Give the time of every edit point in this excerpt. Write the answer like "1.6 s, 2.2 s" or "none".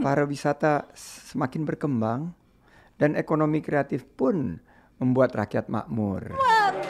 none